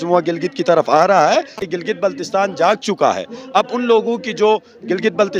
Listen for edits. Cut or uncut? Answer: cut